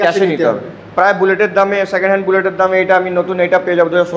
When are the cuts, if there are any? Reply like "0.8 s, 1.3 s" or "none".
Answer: none